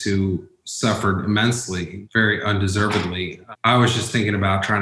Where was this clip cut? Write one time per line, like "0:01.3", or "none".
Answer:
0:01.9
0:03.4